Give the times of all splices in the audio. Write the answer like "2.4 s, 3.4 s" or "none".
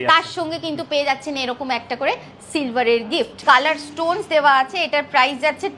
3.4 s